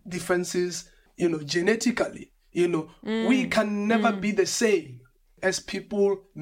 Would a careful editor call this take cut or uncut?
uncut